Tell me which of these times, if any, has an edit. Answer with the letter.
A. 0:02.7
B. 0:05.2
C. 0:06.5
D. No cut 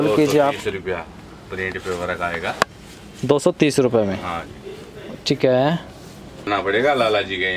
C